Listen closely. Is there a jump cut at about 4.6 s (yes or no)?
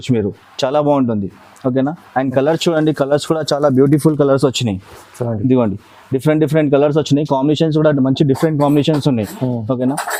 no